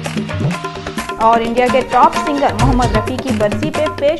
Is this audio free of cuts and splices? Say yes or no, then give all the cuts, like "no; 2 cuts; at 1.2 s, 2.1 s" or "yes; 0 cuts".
no; 1 cut; at 1.1 s